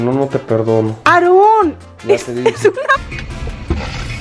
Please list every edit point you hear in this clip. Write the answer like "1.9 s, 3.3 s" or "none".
3.1 s